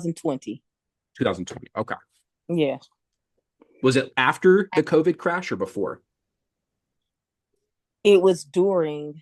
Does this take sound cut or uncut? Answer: uncut